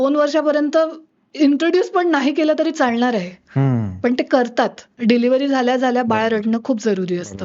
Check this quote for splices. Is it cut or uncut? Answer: cut